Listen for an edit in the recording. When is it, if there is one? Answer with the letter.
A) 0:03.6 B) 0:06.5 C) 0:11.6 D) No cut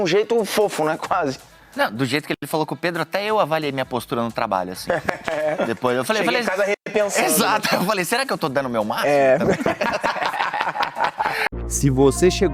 D